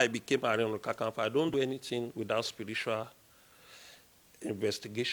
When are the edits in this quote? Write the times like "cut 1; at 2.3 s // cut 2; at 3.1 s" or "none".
cut 1; at 1.5 s